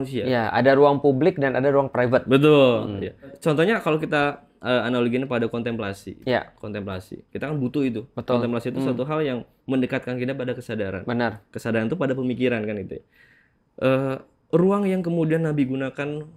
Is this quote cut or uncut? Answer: uncut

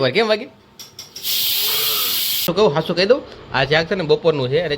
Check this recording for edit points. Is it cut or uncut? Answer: cut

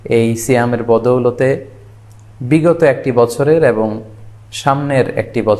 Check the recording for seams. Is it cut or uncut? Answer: uncut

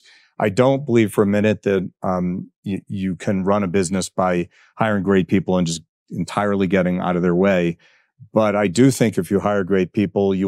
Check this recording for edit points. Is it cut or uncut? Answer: uncut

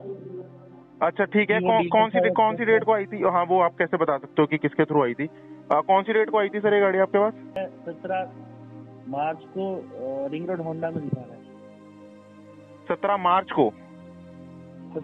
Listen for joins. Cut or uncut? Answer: cut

